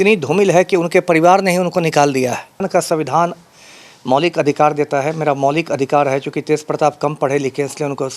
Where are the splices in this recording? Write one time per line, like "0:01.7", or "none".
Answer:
0:02.7